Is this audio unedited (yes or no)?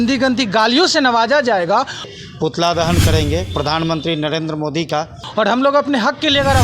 no